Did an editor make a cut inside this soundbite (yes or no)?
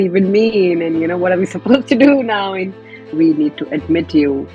yes